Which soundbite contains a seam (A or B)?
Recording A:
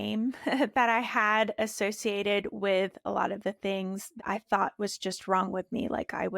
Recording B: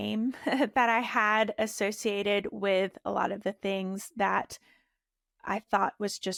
A